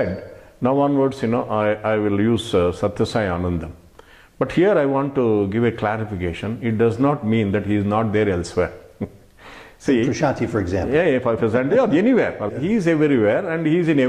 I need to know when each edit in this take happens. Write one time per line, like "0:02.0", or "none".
0:12.5